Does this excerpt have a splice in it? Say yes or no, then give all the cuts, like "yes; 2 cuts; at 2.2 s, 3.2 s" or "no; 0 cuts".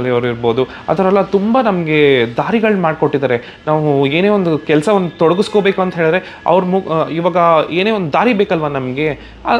no; 0 cuts